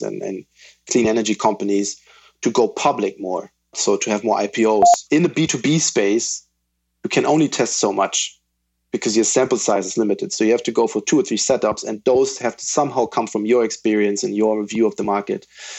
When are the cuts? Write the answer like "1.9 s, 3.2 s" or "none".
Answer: 3.7 s, 5.0 s, 10.3 s

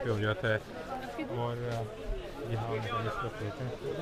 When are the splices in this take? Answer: none

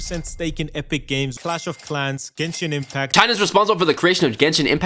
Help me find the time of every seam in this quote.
1.3 s, 3.1 s

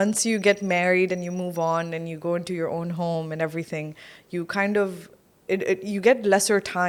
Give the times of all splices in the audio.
none

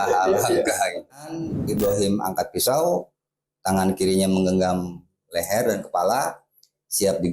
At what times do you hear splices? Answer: 1.5 s

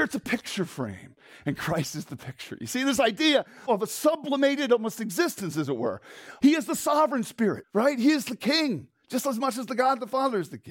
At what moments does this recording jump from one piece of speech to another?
3.6 s, 6.2 s, 7.6 s

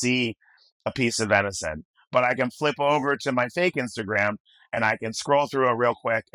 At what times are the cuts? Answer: none

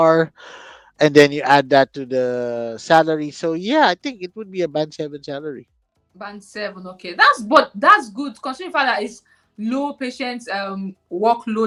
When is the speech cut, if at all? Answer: none

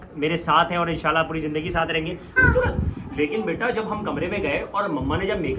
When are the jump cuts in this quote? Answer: 2.4 s

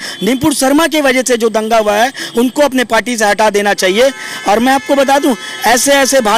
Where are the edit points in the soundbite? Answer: none

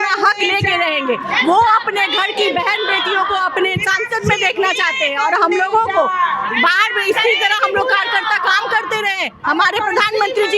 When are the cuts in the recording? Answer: none

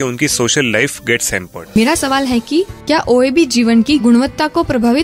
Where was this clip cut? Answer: 1.8 s

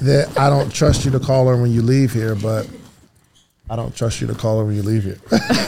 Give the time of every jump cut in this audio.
none

